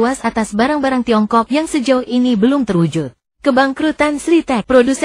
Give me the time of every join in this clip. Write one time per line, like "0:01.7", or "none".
0:03.3